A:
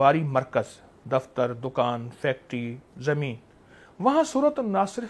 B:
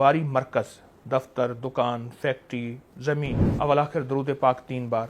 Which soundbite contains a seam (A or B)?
B